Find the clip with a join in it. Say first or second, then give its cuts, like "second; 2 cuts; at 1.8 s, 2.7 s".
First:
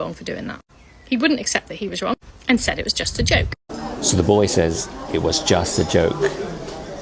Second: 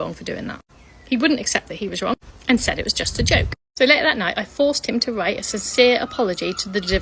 second; 1 cut; at 3.6 s